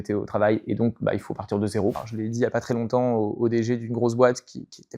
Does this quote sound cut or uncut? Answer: cut